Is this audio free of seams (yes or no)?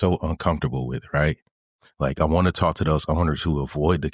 yes